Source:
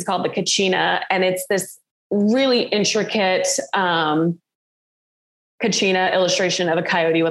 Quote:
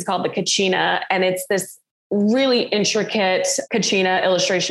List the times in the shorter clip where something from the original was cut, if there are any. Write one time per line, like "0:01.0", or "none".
0:03.6